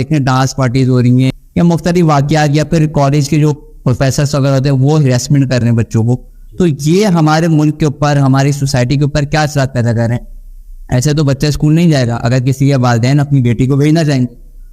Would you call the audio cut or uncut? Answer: cut